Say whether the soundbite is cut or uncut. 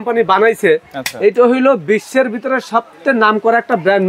uncut